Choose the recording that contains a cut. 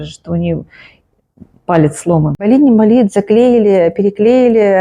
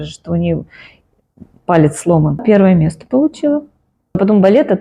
first; 1 cut; at 2.4 s

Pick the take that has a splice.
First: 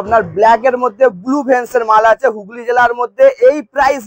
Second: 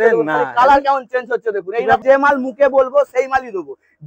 second; 1 cut; at 2.0 s

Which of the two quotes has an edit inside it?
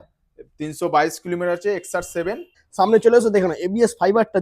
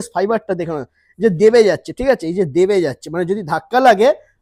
first; 1 cut; at 2.6 s

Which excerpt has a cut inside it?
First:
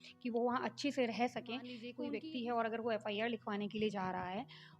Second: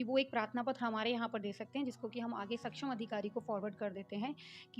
first; 1 cut; at 1.9 s

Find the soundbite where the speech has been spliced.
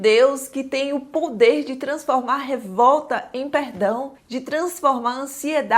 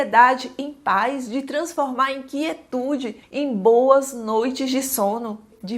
first; 1 cut; at 4.2 s

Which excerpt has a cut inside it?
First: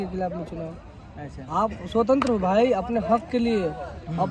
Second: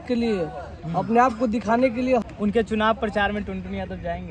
second; 1 cut; at 2.2 s

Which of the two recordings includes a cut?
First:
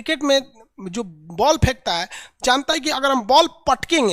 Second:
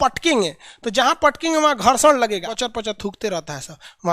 second; 1 cut; at 2.5 s

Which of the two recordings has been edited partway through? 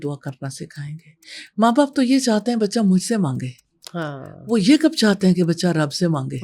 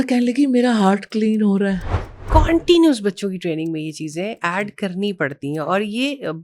second; 1 cut; at 2.2 s

